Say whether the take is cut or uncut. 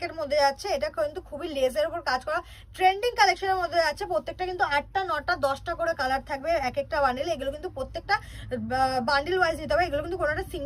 uncut